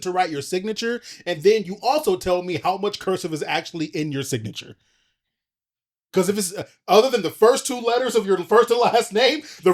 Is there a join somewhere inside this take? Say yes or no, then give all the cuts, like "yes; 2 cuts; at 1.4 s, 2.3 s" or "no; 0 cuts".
no; 0 cuts